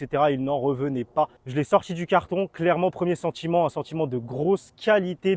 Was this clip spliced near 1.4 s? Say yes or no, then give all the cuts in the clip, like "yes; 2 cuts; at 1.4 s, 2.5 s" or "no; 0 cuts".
no; 0 cuts